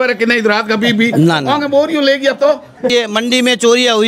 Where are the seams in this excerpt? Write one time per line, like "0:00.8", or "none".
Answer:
0:02.9